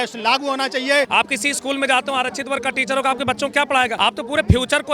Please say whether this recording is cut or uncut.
cut